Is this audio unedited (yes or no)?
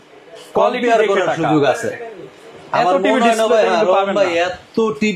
yes